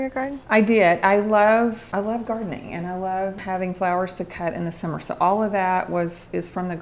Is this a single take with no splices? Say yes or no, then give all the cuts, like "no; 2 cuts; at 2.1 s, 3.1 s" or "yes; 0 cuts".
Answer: no; 2 cuts; at 1.8 s, 3.4 s